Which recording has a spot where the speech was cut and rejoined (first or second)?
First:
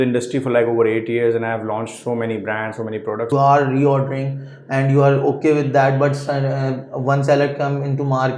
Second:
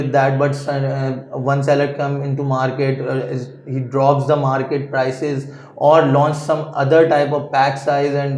first